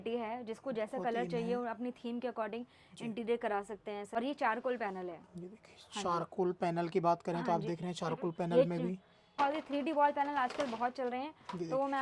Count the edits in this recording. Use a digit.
2